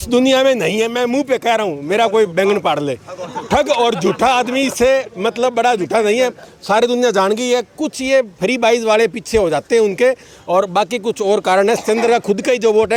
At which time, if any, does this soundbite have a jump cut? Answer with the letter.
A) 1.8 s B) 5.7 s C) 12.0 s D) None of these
D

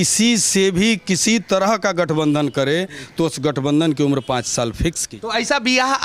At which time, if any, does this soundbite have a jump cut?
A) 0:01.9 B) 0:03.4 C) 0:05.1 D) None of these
C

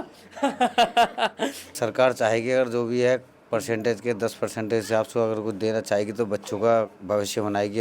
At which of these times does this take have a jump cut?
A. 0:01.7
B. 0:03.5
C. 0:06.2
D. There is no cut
A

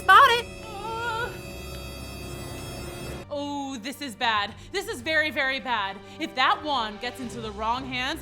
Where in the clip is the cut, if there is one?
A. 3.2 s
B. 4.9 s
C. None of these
A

